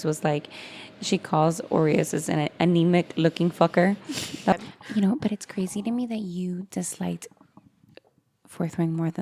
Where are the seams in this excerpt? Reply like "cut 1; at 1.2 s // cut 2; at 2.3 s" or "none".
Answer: cut 1; at 4.5 s